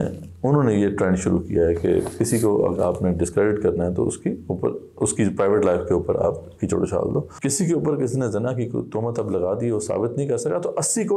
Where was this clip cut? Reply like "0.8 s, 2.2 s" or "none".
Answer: 7.3 s